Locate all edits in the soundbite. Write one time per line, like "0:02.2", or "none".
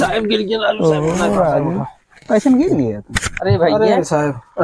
none